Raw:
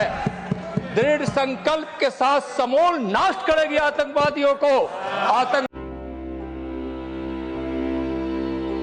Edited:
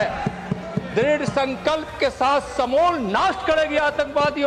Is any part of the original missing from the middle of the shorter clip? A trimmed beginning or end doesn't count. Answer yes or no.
no